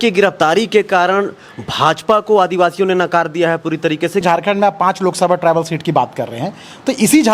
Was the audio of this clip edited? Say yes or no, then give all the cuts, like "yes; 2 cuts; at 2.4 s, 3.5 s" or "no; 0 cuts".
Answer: yes; 1 cut; at 4.2 s